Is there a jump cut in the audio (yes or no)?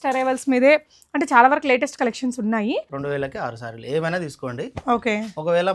yes